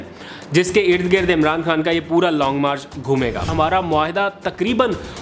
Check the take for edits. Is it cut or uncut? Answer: cut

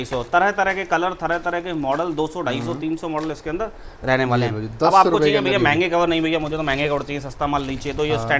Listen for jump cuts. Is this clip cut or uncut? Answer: uncut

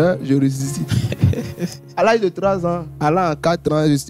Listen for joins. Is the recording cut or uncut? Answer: cut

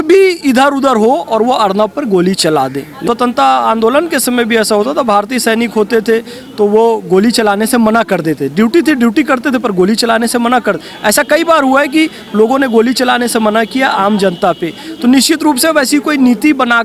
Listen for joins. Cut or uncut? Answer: cut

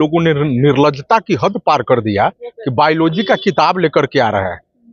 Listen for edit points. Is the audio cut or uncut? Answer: uncut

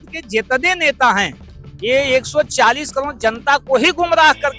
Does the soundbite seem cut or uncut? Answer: uncut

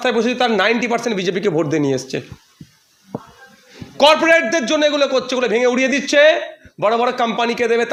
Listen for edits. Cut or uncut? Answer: uncut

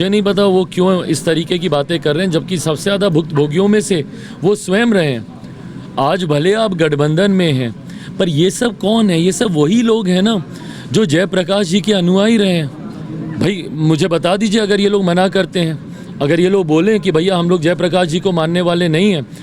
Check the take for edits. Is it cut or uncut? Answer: uncut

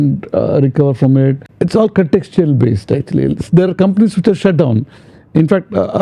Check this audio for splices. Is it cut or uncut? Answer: cut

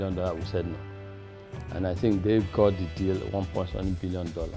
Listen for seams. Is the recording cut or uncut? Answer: uncut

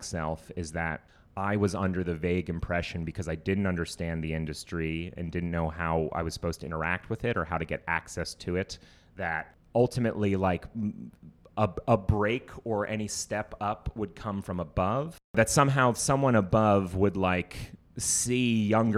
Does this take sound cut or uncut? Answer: cut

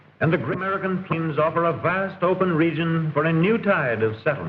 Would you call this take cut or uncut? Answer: uncut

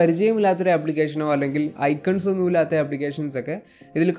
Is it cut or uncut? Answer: uncut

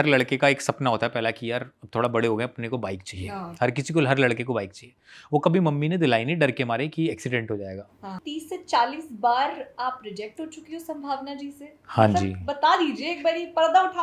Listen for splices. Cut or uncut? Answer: cut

